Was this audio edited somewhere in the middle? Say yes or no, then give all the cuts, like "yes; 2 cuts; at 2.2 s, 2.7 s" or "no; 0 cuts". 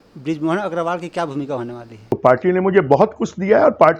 yes; 1 cut; at 2.2 s